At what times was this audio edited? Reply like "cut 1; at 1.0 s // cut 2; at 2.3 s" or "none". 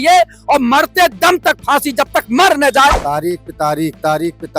cut 1; at 3.0 s